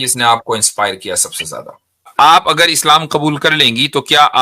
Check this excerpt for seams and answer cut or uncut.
cut